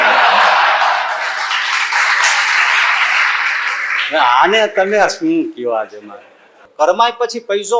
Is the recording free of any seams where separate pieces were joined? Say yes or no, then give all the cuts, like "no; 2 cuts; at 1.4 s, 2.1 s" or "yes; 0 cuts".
no; 1 cut; at 6.7 s